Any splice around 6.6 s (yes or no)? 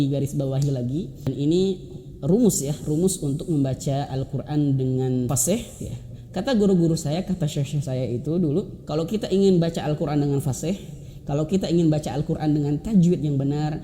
no